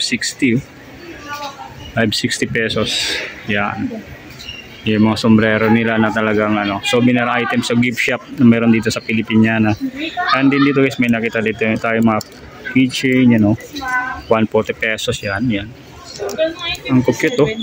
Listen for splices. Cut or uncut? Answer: uncut